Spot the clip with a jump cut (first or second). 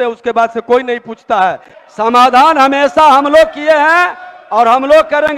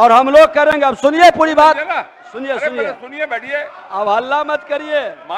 first